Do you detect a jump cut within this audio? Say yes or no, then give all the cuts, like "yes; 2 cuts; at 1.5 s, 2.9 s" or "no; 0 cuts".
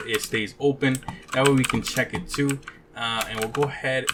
no; 0 cuts